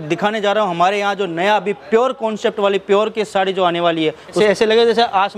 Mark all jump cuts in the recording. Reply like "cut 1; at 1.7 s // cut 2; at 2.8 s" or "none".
cut 1; at 4.4 s